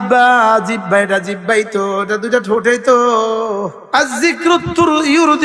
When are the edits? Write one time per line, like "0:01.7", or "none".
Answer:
0:03.8